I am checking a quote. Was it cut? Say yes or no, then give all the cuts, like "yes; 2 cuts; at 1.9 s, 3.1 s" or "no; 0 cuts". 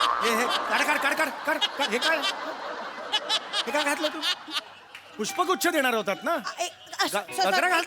no; 0 cuts